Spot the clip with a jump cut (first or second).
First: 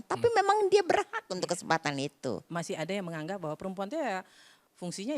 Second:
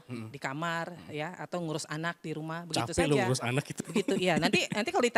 first